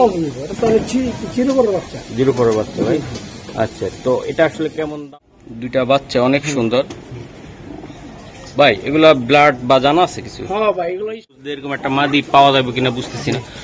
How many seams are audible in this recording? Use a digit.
2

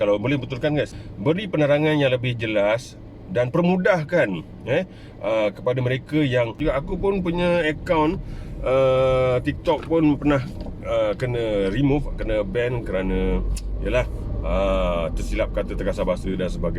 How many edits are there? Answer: 2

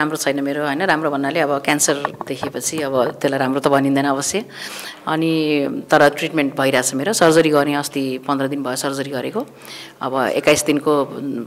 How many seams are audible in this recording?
0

